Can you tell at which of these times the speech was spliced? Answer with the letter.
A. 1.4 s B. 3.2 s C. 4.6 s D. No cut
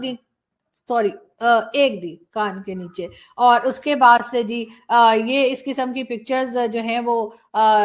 D